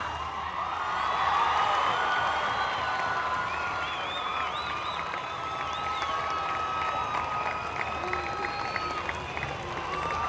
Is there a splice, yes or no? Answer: yes